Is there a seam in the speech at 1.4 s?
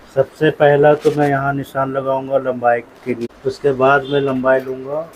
no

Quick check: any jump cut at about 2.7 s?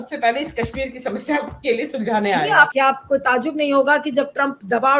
yes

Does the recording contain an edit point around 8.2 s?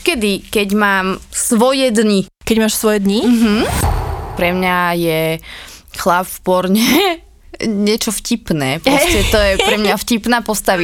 no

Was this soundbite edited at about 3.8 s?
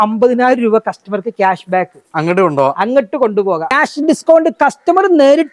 yes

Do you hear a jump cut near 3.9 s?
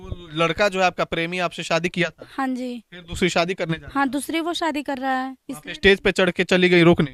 no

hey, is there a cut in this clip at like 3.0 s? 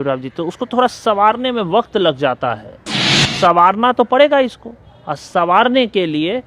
yes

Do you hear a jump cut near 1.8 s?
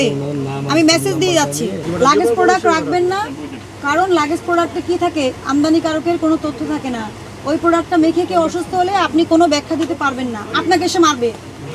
yes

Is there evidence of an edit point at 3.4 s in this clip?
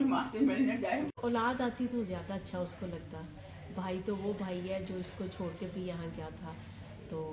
no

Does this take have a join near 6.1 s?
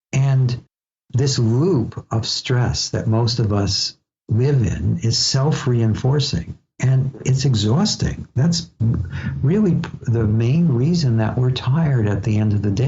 no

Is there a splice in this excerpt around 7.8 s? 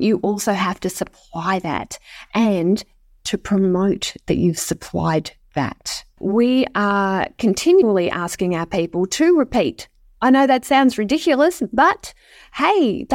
yes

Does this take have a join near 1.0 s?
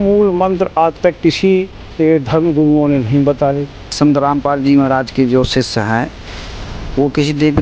no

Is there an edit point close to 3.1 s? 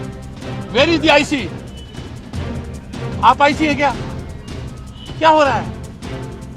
yes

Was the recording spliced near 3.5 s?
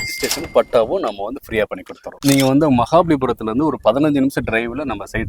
no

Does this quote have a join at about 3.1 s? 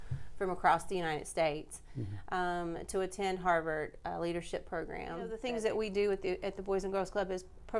no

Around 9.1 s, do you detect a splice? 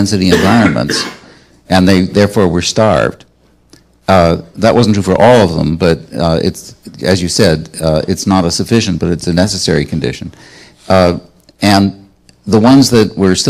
no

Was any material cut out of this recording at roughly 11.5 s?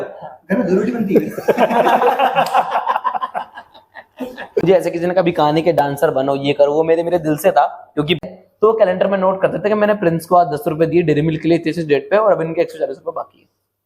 no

